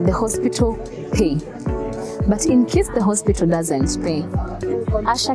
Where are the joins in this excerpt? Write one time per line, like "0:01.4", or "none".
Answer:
none